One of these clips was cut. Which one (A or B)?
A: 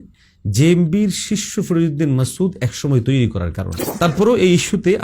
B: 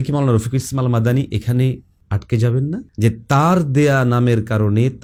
A